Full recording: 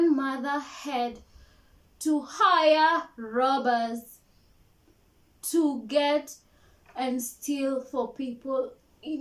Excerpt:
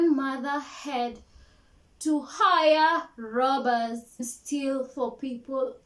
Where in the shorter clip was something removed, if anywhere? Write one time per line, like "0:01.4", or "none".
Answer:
0:04.3